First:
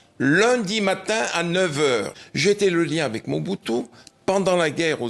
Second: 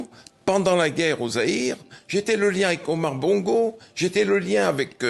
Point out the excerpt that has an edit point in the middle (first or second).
first